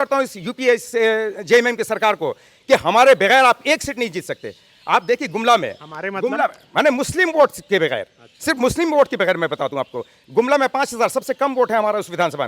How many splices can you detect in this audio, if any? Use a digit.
0